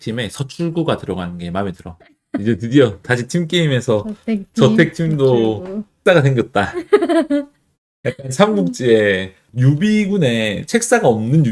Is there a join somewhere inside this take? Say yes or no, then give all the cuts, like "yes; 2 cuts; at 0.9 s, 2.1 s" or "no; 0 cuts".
yes; 2 cuts; at 5.9 s, 9.4 s